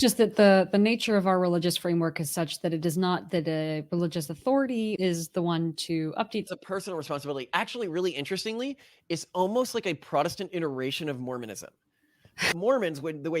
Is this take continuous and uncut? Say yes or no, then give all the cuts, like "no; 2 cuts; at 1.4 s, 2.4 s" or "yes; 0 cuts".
no; 3 cuts; at 5.0 s, 6.5 s, 12.5 s